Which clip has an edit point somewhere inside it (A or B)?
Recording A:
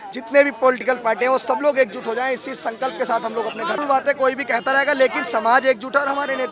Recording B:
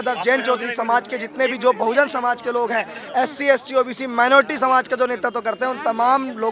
A